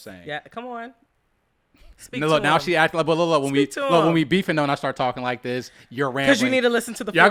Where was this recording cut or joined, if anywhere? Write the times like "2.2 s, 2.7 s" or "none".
none